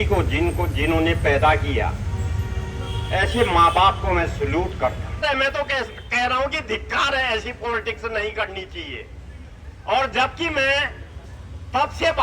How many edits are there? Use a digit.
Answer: 1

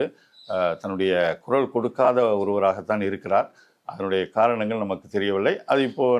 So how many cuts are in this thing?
0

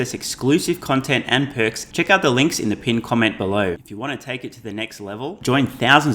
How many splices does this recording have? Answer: 2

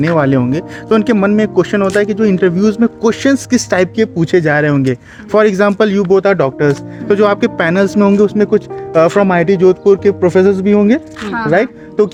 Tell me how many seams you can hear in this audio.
0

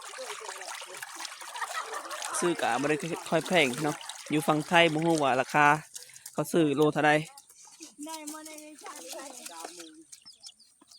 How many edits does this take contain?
1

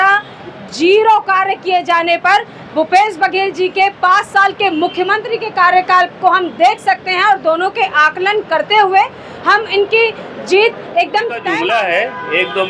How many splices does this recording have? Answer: 1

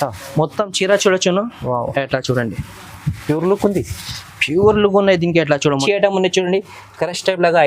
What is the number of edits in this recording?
1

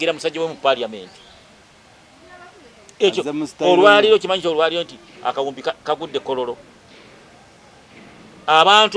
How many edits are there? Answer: 0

